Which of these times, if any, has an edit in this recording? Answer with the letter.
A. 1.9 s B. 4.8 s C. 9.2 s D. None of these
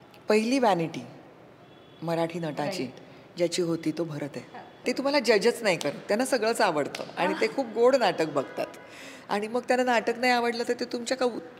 B